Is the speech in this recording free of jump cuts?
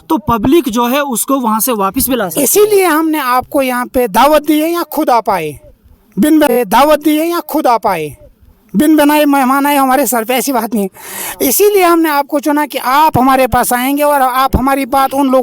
yes; 0 cuts

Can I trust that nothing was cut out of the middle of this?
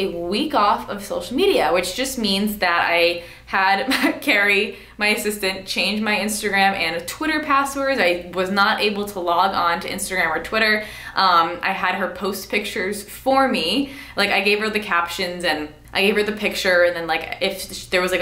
yes; 0 cuts

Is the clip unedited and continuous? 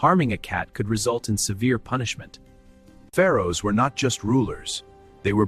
no; 1 cut; at 3.0 s

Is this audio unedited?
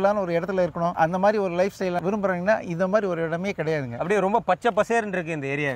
no; 3 cuts; at 0.9 s, 2.0 s, 4.0 s

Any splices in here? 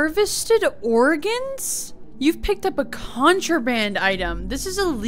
no; 0 cuts

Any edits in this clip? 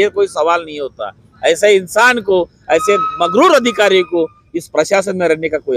no; 0 cuts

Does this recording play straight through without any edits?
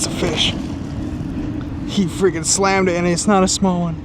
yes; 0 cuts

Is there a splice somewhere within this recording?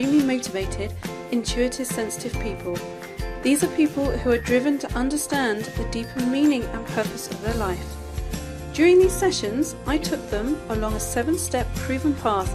yes; 1 cut; at 6.6 s

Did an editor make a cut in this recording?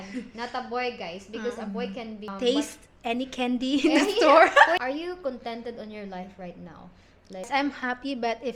yes; 3 cuts; at 2.3 s, 4.8 s, 7.5 s

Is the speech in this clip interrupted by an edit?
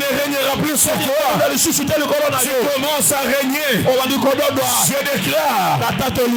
no; 0 cuts

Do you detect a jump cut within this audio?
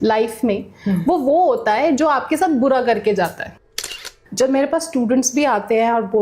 yes; 1 cut; at 3.8 s

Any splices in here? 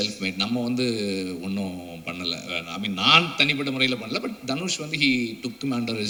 no; 0 cuts

